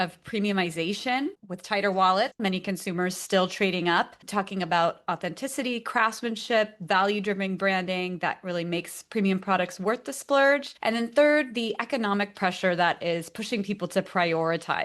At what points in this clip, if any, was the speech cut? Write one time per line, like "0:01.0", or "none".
0:01.4
0:02.4